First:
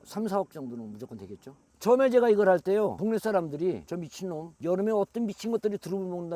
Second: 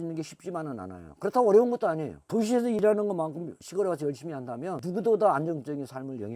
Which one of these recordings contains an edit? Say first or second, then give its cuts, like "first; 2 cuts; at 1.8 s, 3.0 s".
second; 2 cuts; at 2.8 s, 4.8 s